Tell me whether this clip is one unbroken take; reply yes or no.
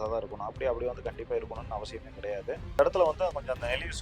no